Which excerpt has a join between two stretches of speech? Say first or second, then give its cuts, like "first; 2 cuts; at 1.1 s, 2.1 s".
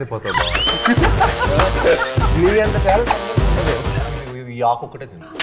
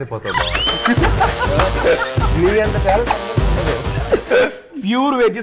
first; 1 cut; at 4.0 s